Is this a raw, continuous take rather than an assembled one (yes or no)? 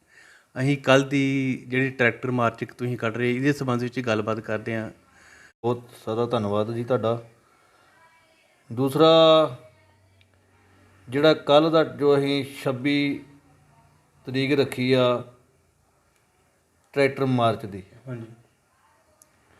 no